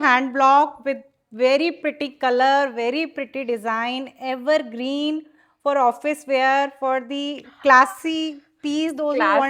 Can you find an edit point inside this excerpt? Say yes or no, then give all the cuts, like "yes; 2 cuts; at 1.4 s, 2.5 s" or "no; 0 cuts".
no; 0 cuts